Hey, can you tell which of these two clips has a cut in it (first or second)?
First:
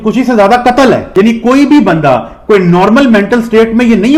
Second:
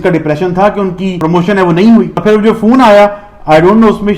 second